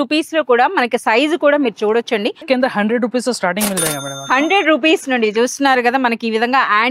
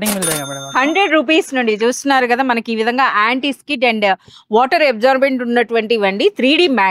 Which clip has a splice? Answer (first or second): first